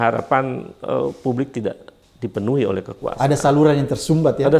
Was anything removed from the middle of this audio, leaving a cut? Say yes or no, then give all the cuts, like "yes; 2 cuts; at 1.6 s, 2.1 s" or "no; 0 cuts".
no; 0 cuts